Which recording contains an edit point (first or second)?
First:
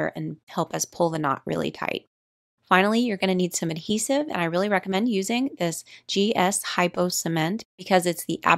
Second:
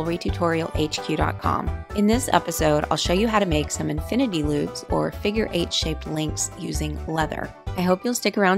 first